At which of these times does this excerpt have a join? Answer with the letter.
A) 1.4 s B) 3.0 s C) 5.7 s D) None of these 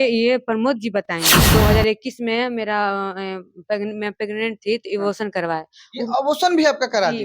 A